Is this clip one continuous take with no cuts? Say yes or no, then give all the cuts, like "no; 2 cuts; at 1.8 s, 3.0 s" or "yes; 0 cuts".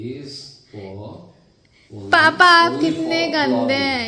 yes; 0 cuts